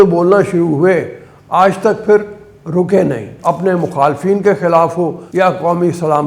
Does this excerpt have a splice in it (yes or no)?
yes